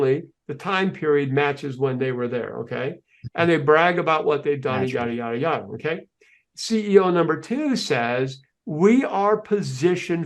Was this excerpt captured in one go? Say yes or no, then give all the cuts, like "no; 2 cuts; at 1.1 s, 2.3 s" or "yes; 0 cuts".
yes; 0 cuts